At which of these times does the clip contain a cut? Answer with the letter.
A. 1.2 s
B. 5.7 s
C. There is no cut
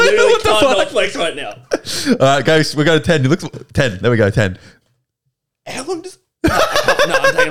C